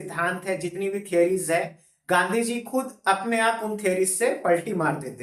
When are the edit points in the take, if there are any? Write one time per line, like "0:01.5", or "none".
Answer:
none